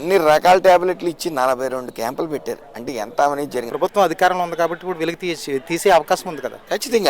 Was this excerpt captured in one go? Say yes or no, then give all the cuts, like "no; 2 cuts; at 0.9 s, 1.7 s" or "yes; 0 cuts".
no; 1 cut; at 3.7 s